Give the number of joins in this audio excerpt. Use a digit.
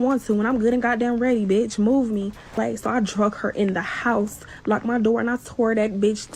2